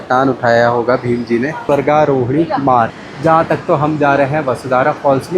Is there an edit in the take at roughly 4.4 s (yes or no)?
no